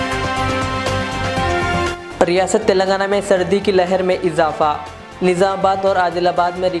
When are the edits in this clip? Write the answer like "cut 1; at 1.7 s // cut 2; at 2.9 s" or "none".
cut 1; at 1.8 s